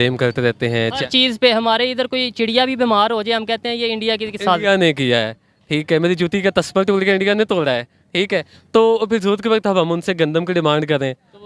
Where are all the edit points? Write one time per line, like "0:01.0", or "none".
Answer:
none